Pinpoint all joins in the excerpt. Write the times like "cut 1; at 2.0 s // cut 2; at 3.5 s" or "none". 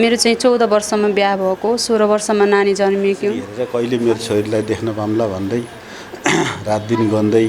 cut 1; at 3.5 s